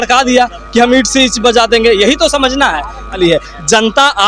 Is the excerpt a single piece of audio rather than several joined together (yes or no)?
no